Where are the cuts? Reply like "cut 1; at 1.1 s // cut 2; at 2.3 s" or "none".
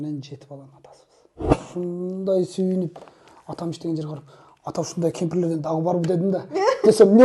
cut 1; at 1.6 s